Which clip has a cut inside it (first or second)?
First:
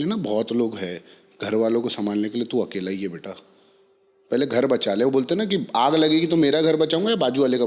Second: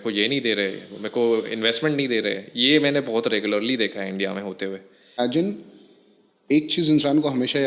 second